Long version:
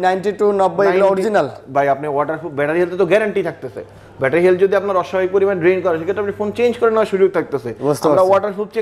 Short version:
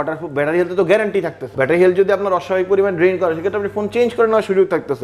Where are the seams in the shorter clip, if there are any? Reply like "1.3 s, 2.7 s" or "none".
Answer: 1.4 s